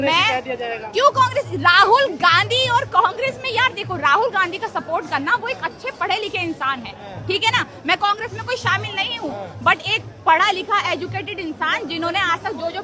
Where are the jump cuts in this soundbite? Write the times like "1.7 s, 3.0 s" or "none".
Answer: none